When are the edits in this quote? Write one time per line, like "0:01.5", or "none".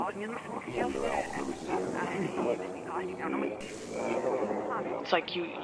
0:03.6